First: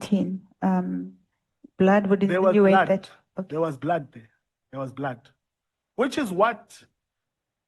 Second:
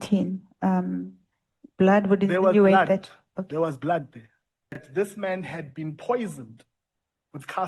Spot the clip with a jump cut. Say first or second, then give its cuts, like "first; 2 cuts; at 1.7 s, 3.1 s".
second; 1 cut; at 4.8 s